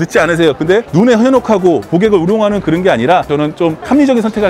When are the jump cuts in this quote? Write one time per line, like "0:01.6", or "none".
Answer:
0:03.3